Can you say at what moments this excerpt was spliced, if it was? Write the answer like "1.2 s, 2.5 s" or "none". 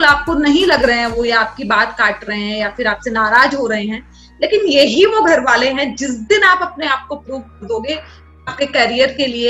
8.2 s